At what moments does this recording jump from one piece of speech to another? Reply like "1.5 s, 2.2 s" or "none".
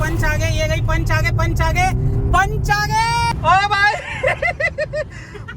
3.3 s